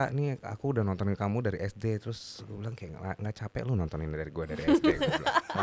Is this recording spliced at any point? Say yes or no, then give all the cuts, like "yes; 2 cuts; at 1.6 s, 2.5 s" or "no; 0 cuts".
no; 0 cuts